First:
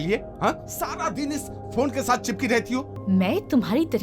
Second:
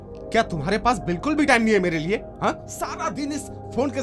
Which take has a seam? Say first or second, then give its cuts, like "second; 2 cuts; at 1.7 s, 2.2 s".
first; 1 cut; at 2.9 s